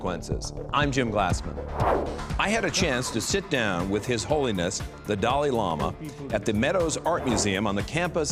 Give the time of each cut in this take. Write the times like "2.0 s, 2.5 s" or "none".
none